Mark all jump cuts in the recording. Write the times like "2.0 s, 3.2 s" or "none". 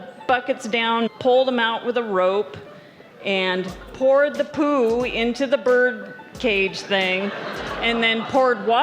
1.1 s